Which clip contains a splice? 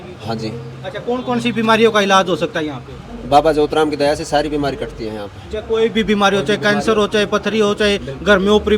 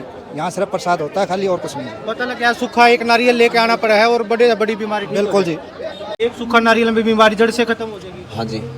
second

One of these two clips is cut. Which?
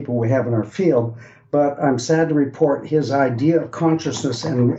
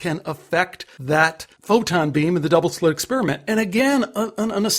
second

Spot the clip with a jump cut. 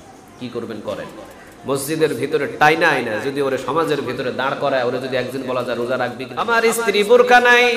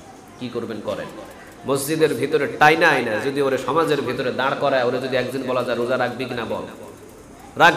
first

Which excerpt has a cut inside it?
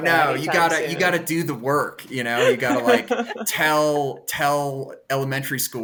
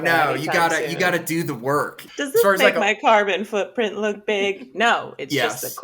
second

